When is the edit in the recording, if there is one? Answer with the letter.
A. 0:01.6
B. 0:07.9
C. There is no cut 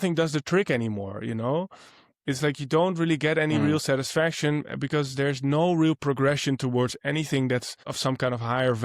B